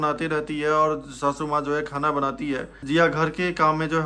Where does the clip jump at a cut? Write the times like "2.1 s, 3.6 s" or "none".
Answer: 2.7 s

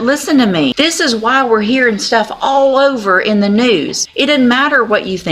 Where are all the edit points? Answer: 0.7 s, 4.0 s

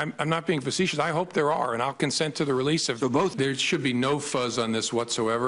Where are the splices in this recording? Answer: 3.3 s

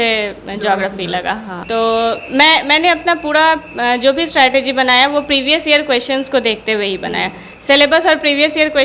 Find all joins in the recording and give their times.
1.5 s

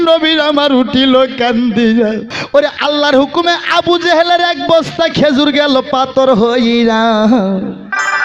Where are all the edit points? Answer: 2.3 s

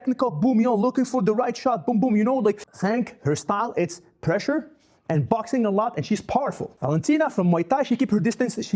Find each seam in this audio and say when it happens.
2.7 s, 6.7 s

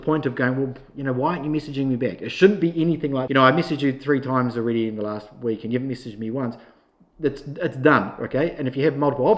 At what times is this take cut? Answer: 3.2 s

